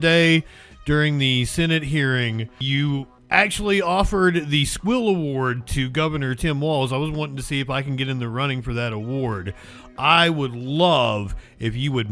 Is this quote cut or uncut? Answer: cut